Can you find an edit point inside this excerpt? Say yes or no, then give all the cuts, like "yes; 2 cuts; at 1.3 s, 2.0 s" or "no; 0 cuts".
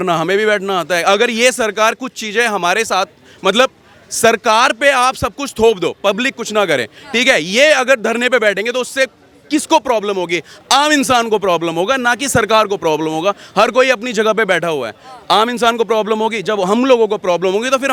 no; 0 cuts